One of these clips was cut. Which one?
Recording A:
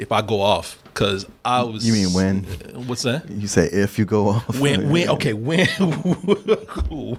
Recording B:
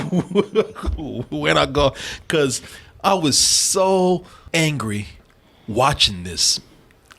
B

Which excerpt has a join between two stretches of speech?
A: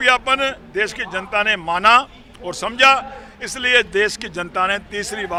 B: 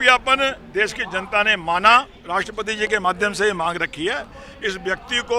B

